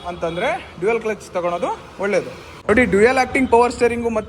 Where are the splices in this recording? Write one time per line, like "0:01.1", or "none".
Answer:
0:02.5